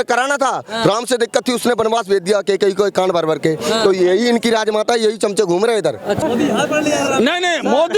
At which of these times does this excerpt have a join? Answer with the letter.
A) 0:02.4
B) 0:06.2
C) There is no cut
B